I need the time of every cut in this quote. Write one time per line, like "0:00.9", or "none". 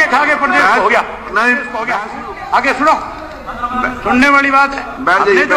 0:01.8